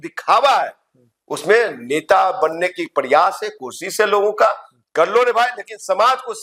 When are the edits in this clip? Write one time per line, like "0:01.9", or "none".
none